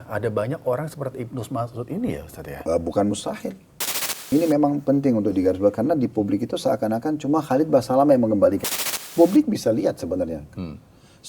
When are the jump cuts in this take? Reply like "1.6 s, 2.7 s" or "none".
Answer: 4.1 s, 8.8 s